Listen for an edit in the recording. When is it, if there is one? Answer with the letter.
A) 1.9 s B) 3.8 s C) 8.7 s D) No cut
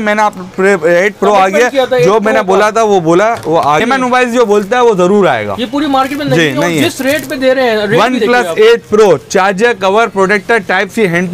B